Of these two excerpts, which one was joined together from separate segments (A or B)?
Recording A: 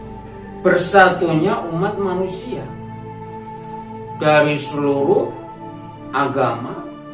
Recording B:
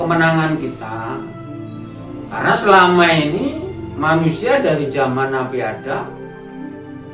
A